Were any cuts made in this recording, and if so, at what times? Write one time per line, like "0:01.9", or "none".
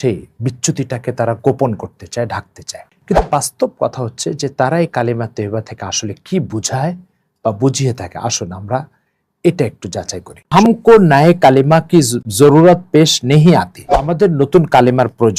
0:10.5
0:12.2
0:14.1

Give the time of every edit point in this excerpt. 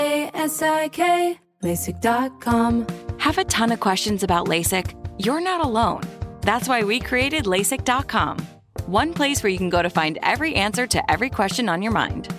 0:02.8

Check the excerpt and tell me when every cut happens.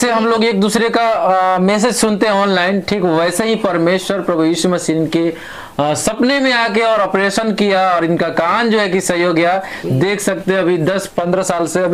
none

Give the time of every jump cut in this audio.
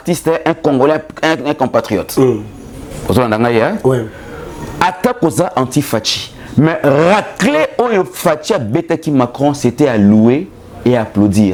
none

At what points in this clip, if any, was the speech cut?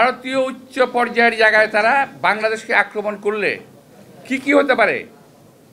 none

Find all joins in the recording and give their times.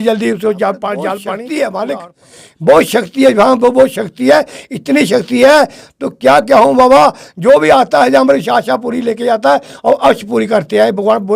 0:01.3

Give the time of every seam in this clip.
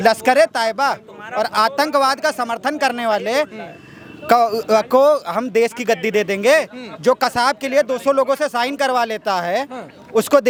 none

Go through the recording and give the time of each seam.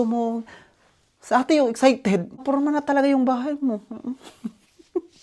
0:02.4

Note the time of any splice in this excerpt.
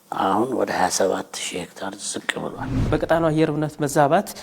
0:02.9

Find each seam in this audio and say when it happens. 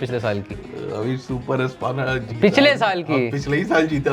none

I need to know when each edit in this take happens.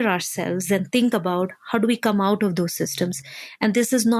none

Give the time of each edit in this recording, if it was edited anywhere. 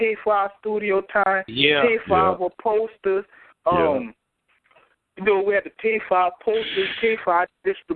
none

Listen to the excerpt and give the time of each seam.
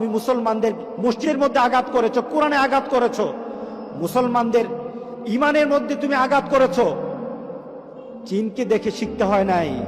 0:01.2

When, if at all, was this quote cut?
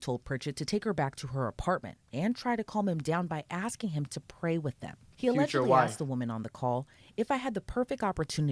0:05.0

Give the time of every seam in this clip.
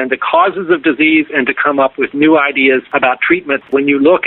0:03.1

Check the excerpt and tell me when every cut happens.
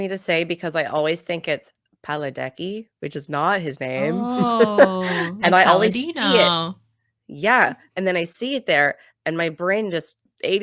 none

